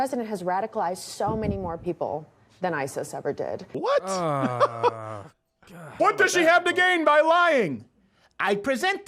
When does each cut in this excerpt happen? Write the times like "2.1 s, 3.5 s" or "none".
3.7 s, 5.9 s

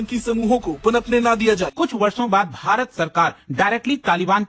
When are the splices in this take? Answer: 1.7 s

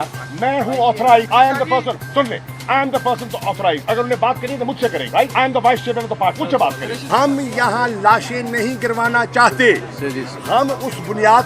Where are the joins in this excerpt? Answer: 1.3 s, 3.8 s, 5.2 s, 6.8 s

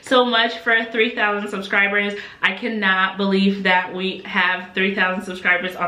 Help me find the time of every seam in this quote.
none

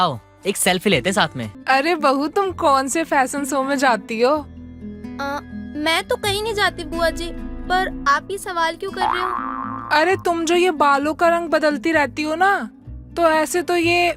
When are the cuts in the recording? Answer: 1.5 s

